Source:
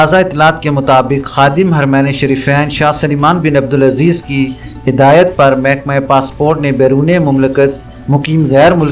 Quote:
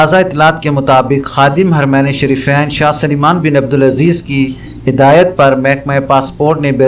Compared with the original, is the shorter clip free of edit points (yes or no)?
yes